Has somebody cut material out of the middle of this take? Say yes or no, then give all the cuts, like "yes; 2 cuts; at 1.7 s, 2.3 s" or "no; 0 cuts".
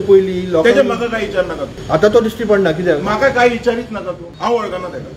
yes; 2 cuts; at 1.7 s, 4.2 s